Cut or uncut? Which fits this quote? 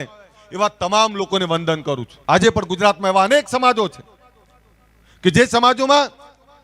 cut